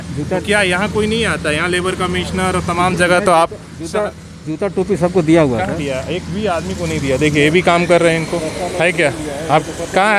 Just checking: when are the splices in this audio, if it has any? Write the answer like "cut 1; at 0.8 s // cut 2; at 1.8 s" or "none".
none